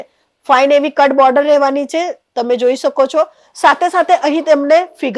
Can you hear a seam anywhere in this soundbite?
no; 0 cuts

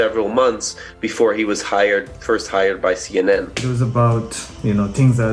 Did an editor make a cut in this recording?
yes; 1 cut; at 3.6 s

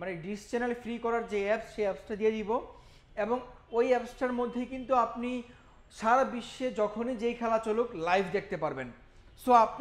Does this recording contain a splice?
no; 0 cuts

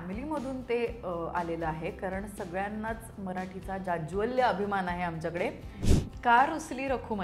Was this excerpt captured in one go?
no; 1 cut; at 5.8 s

